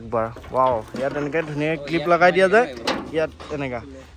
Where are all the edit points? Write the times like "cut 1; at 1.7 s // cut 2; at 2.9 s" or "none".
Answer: none